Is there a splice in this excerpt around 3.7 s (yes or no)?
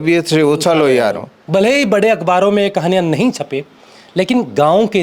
no